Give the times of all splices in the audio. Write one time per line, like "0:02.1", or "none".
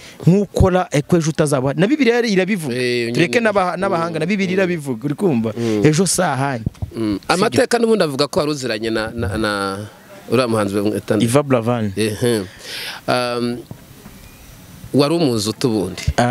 none